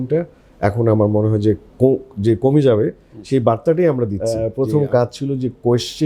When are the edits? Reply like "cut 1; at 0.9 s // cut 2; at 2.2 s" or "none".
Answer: cut 1; at 4.2 s